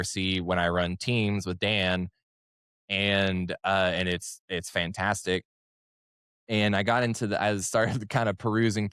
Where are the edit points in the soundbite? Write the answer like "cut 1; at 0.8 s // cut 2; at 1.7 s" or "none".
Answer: none